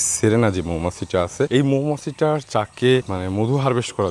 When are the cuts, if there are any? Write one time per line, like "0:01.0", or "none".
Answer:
0:01.5
0:03.1